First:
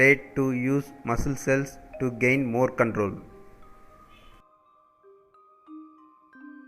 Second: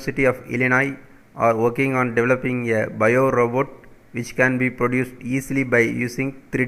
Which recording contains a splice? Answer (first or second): first